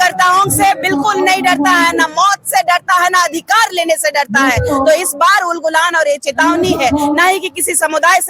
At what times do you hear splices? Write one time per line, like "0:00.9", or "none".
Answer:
none